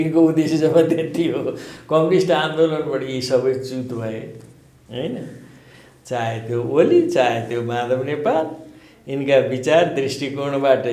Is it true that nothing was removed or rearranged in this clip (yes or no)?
yes